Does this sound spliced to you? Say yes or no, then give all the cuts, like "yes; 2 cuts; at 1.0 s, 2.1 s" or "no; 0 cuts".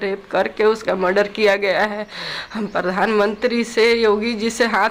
no; 0 cuts